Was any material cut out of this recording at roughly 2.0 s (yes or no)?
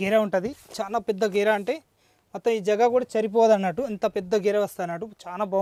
no